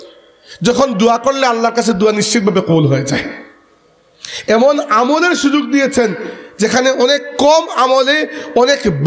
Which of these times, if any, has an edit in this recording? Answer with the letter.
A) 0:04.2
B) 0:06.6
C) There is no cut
C